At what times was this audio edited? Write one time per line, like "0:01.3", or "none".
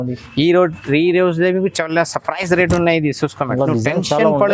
0:03.4